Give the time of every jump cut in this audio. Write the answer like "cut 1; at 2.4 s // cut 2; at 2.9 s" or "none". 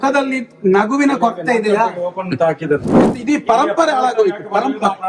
cut 1; at 3.1 s